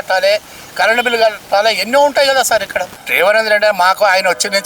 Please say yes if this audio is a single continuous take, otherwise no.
no